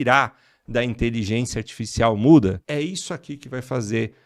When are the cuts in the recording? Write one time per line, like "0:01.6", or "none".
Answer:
0:02.6